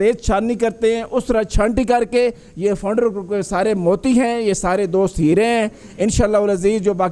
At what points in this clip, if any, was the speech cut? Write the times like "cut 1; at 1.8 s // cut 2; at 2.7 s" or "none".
none